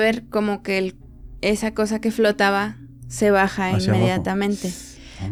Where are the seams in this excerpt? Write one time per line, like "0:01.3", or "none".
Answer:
none